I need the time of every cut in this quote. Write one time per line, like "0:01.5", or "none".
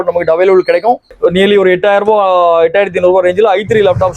0:01.1